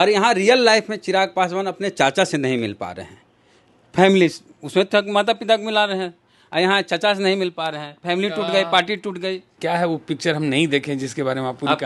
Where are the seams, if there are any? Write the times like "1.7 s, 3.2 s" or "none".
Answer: 9.5 s